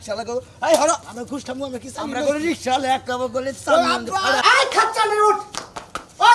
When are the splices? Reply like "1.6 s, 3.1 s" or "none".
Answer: 1.1 s, 4.4 s